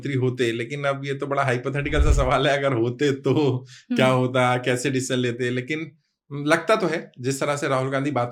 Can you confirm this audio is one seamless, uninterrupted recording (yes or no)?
yes